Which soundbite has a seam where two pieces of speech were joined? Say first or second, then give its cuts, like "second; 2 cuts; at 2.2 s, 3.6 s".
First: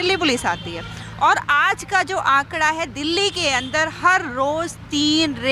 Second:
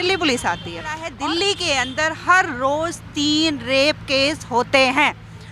second; 1 cut; at 1.1 s